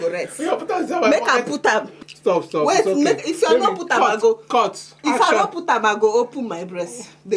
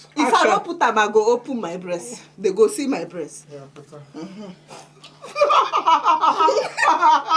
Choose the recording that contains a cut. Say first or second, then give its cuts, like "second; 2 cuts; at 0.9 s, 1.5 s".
first; 1 cut; at 1.9 s